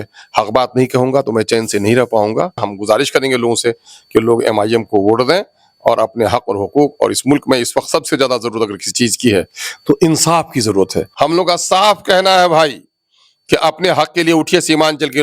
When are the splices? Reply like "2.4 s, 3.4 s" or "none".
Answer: 2.7 s, 11.1 s